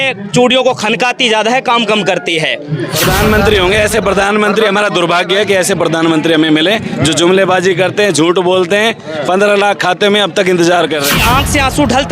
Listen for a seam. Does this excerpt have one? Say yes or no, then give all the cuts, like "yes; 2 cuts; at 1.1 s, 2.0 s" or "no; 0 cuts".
yes; 2 cuts; at 3.0 s, 11.1 s